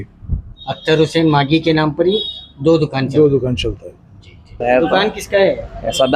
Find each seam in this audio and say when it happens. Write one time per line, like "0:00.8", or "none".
0:04.6